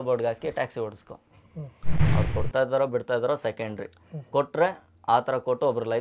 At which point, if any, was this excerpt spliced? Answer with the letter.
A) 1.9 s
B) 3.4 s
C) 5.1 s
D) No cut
A